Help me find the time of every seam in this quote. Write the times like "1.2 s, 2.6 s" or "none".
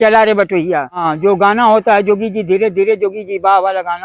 1.1 s